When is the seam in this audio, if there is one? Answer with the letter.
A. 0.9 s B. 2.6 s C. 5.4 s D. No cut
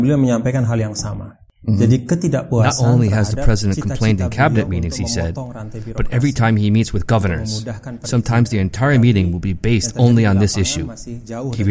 B